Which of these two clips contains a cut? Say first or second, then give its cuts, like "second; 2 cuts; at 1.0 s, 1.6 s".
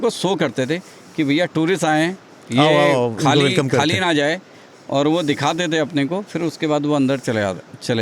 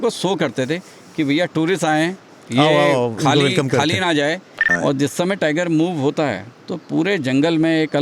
second; 1 cut; at 4.7 s